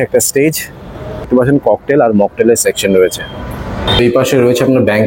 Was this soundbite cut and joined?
yes; 2 cuts; at 1.3 s, 3.9 s

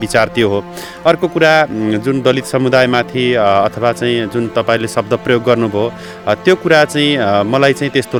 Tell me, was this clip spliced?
no; 0 cuts

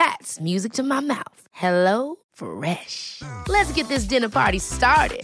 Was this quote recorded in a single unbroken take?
yes; 0 cuts

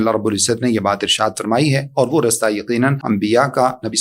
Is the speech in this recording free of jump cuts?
no; 1 cut; at 3.0 s

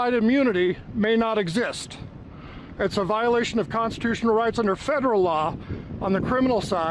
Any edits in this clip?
no; 0 cuts

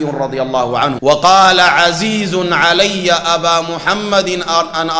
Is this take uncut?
no; 1 cut; at 1.0 s

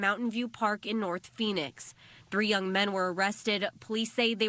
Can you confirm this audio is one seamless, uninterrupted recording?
yes; 0 cuts

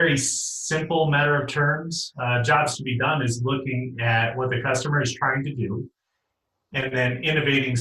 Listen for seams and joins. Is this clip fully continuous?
yes; 0 cuts

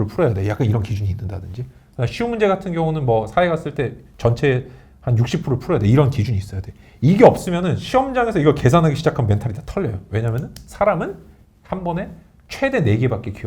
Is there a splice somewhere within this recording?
no; 0 cuts

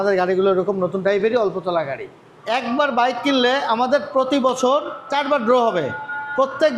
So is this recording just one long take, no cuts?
no; 2 cuts; at 2.3 s, 5.1 s

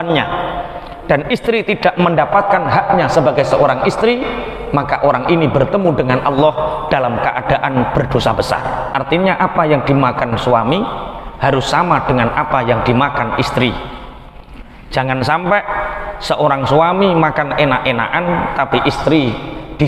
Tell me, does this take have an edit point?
yes; 1 cut; at 8.9 s

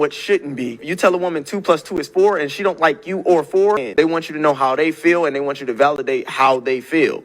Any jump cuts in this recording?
yes; 1 cut; at 3.9 s

